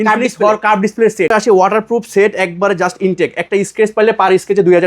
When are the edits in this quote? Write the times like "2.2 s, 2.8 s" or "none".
1.3 s